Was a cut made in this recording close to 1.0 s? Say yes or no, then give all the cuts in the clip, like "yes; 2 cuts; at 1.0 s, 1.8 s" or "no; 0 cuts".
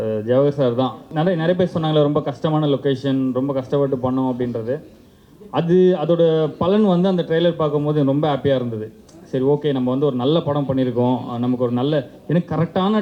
yes; 1 cut; at 1.0 s